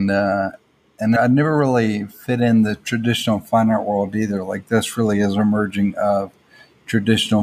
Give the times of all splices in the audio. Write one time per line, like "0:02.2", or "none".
0:01.2